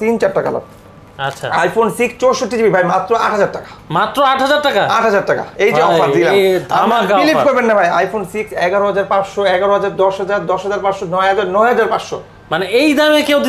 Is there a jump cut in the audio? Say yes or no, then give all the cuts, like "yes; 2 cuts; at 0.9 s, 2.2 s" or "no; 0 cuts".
no; 0 cuts